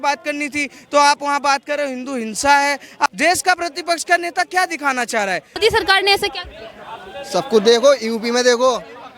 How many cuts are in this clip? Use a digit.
2